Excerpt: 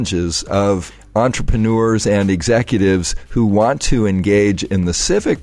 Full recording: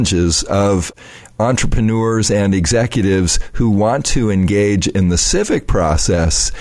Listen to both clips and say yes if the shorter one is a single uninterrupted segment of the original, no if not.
no